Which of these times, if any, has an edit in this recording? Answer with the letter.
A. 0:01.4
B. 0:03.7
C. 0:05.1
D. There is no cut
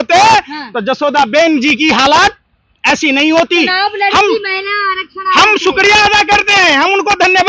D